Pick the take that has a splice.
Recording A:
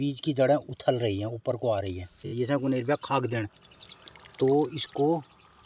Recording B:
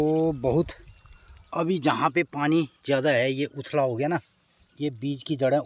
A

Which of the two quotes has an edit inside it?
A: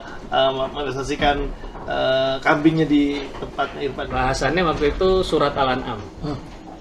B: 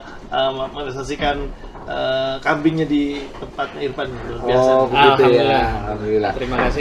A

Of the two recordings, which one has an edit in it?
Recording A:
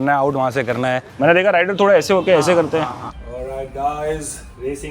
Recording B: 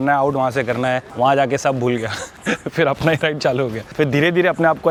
A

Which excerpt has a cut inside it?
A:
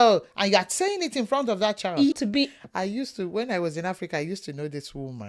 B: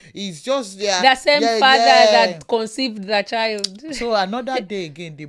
A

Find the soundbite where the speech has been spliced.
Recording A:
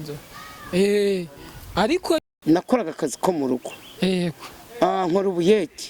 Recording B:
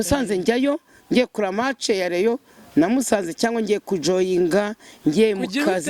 A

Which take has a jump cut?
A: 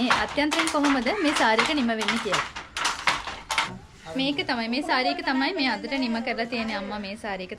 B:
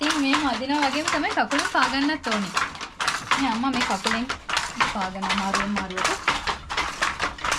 A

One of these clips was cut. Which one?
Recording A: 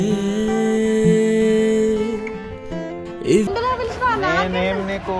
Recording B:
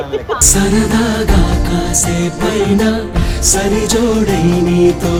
A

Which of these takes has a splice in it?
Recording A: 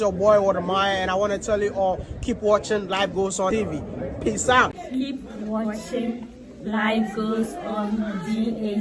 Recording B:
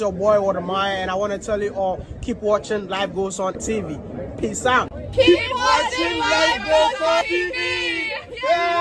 A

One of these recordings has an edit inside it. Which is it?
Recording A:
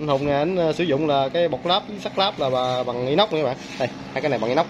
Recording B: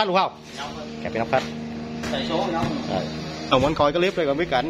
B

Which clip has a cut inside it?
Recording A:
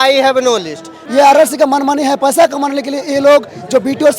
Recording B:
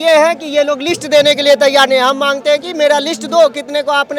A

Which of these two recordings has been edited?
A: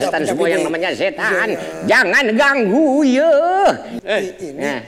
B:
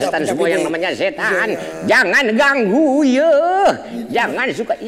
A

